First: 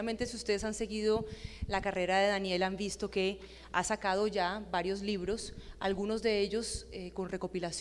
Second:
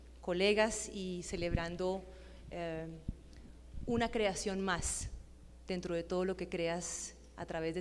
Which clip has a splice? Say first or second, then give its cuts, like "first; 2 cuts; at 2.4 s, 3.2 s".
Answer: second; 1 cut; at 1.4 s